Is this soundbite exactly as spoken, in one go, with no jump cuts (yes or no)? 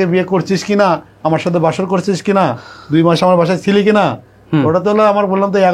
yes